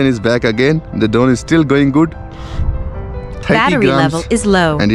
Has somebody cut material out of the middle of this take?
yes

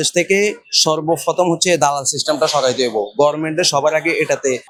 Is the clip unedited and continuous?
yes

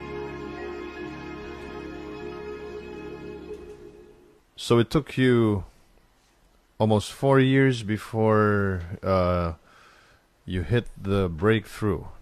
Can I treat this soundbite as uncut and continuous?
yes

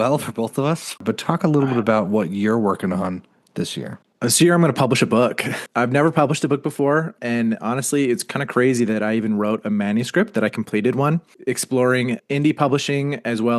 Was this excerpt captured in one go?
no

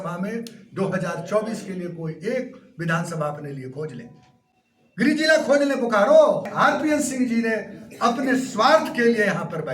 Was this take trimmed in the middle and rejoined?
yes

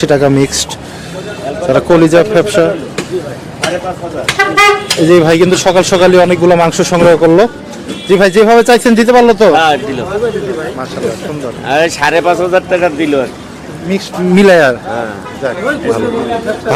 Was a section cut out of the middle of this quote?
no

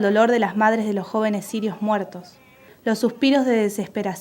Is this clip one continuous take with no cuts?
no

